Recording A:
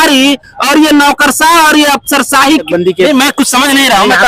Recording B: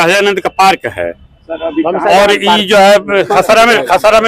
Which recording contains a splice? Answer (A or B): A